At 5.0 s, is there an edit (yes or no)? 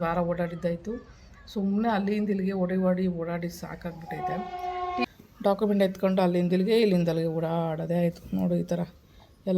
yes